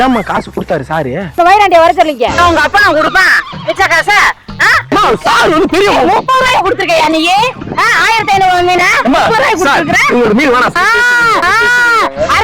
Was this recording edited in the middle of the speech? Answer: yes; 3 cuts; at 1.3 s, 2.4 s, 10.8 s

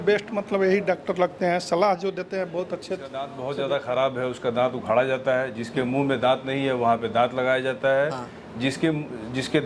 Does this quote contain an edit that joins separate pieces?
yes; 1 cut; at 3.4 s

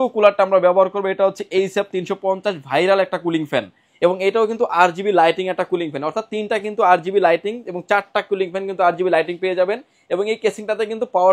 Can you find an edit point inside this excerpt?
no; 0 cuts

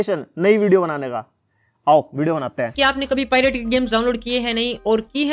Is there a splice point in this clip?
no; 0 cuts

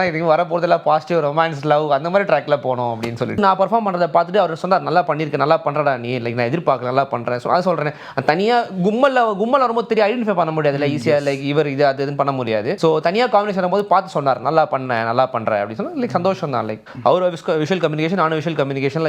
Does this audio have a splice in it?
yes; 3 cuts; at 3.4 s, 12.7 s, 16.9 s

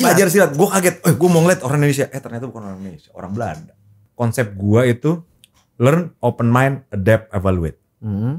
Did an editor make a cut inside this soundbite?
yes; 1 cut; at 4.0 s

